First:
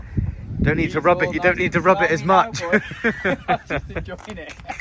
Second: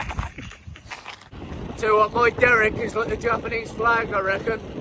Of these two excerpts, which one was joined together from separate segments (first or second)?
second